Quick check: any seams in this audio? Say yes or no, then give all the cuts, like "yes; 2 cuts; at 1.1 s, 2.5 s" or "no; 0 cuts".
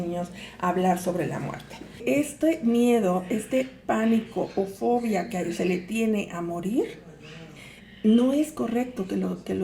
yes; 1 cut; at 2.0 s